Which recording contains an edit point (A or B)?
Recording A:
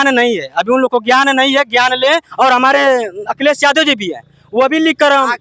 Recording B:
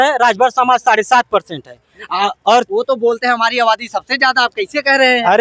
A